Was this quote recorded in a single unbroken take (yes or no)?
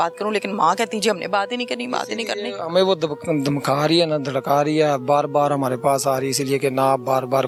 yes